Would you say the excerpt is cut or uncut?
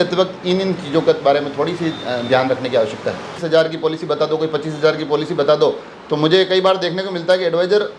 cut